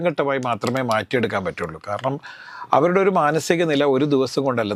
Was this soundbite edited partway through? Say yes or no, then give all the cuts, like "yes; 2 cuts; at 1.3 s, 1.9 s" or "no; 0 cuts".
no; 0 cuts